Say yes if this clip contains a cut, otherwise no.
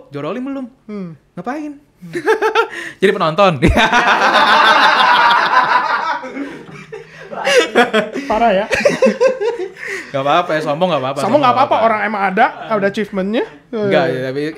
no